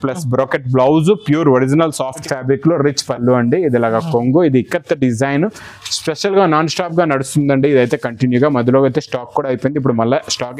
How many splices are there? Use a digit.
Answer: 1